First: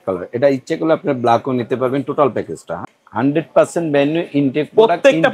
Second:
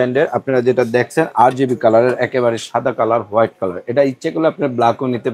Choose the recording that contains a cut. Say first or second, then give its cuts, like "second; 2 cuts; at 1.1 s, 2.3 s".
first; 1 cut; at 2.7 s